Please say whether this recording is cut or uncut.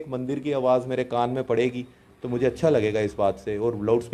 uncut